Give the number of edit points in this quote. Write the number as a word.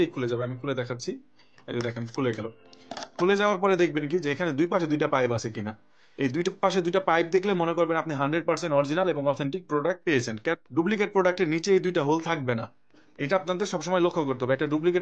one